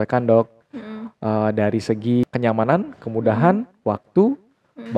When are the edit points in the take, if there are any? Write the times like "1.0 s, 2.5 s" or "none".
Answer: 2.2 s